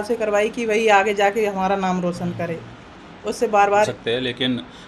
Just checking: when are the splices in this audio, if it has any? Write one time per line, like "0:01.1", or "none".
0:03.9